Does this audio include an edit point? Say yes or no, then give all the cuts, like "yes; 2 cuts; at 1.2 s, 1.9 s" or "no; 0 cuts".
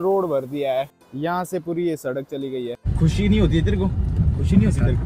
yes; 2 cuts; at 1.0 s, 2.9 s